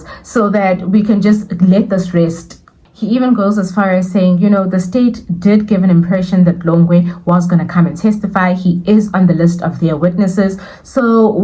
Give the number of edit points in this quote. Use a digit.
0